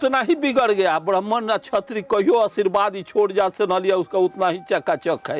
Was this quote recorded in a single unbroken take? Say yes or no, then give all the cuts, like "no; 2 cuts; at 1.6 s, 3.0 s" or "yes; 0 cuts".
yes; 0 cuts